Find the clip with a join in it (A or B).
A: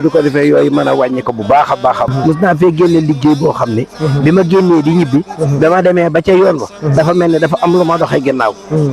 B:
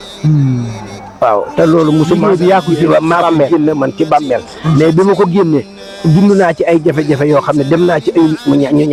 A